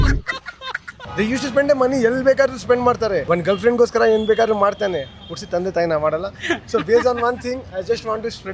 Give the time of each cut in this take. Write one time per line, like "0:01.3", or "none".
0:00.9